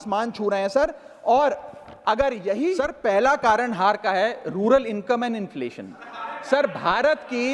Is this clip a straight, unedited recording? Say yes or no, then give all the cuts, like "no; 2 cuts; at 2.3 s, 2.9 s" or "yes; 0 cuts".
no; 1 cut; at 2.8 s